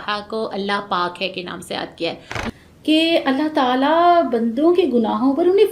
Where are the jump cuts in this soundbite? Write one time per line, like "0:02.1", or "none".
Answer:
0:02.4